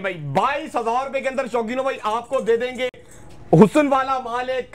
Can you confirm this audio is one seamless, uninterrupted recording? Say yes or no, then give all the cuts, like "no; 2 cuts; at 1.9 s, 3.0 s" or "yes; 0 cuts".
yes; 0 cuts